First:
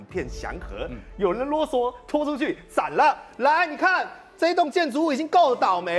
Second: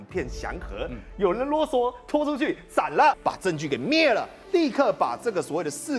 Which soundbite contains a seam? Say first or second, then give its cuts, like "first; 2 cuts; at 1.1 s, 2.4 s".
second; 1 cut; at 3.2 s